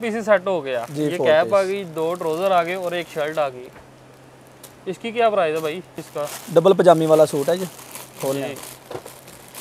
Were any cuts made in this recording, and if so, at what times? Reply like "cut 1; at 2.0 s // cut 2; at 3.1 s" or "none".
cut 1; at 6.0 s

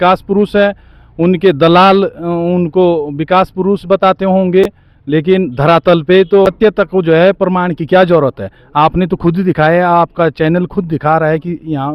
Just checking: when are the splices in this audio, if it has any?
none

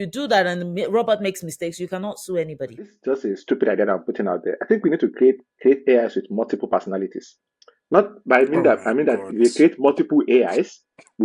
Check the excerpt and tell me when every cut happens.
cut 1; at 3.0 s

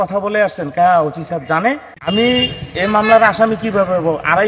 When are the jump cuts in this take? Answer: cut 1; at 2.0 s

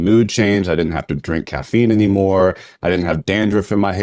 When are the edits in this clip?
none

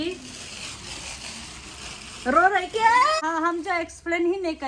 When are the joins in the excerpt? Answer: cut 1; at 3.2 s

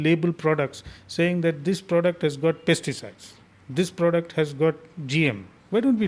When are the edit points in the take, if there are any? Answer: none

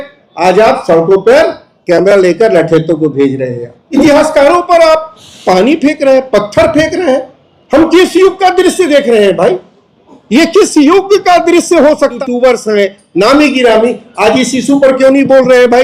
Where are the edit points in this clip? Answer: cut 1; at 3.7 s // cut 2; at 12.2 s

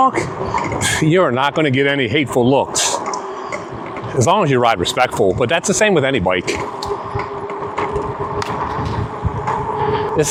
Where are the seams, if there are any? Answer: none

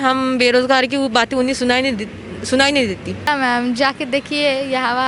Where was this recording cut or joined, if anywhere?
cut 1; at 3.3 s

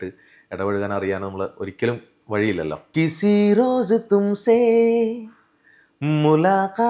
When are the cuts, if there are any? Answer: cut 1; at 2.9 s

